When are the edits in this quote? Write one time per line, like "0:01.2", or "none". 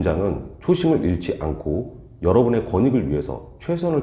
none